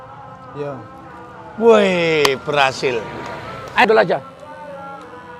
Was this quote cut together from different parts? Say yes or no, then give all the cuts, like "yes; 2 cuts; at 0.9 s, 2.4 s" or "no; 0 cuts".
yes; 1 cut; at 3.9 s